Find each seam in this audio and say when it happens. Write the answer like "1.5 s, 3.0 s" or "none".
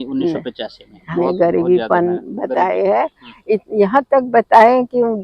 1.1 s